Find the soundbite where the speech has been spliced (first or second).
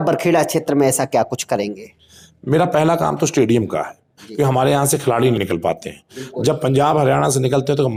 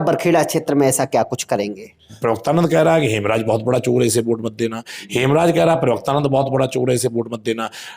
second